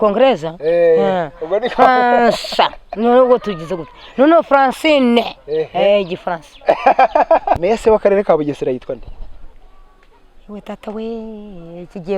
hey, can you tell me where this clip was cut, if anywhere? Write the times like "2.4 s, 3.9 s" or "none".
7.6 s